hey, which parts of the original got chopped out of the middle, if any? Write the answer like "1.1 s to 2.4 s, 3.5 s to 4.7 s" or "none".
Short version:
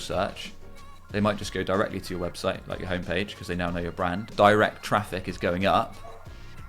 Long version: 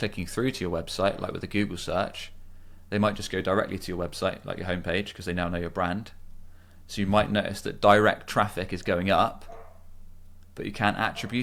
6.1 s to 7.7 s